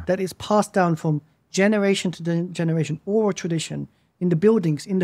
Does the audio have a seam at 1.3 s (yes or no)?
no